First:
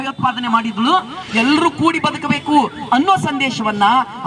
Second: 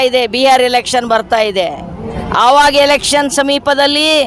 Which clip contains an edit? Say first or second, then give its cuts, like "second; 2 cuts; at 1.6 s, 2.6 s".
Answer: first; 1 cut; at 1.2 s